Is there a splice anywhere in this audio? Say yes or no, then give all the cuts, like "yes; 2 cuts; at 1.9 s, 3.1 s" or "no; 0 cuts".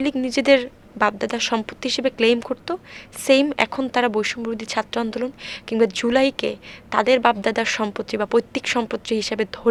no; 0 cuts